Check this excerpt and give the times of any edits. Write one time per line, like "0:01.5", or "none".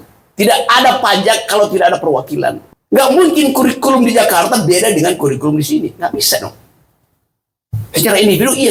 0:02.7